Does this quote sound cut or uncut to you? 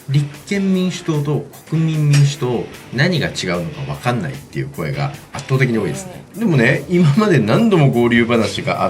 cut